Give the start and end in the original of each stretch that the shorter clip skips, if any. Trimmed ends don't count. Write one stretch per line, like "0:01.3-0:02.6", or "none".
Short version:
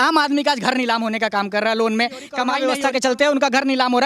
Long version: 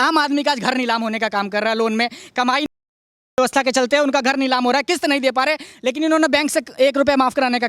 0:02.6-0:03.3